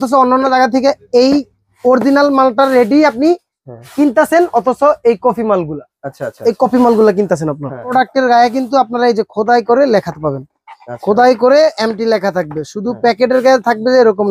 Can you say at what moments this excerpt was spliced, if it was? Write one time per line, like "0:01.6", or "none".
0:07.9